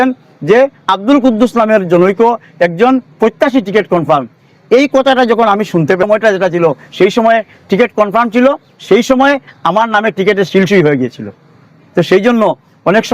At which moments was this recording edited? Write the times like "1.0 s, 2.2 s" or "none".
6.0 s